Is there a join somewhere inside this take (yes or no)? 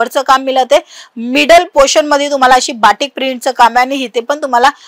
no